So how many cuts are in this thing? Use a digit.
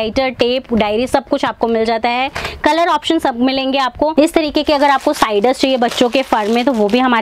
1